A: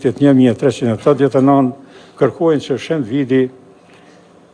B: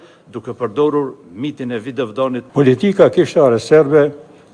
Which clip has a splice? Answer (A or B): B